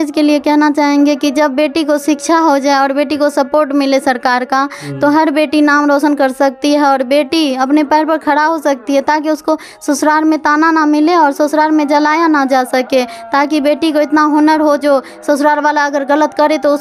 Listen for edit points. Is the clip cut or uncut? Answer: uncut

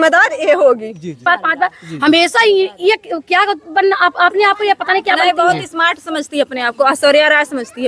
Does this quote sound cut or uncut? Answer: cut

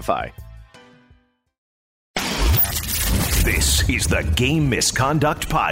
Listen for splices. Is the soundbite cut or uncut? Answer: cut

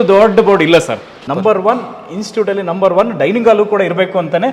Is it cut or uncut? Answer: cut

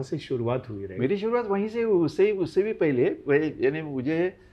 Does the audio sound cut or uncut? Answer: uncut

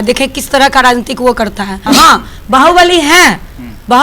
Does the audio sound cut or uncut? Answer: cut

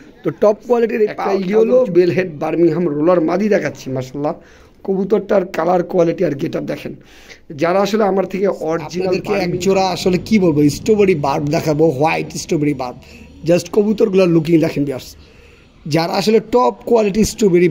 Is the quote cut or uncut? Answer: cut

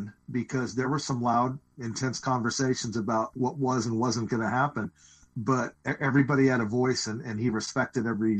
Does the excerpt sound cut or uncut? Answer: cut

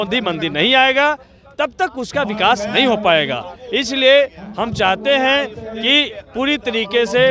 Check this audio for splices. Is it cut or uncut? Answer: uncut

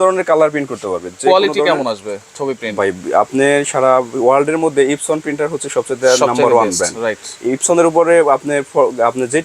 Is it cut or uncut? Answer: uncut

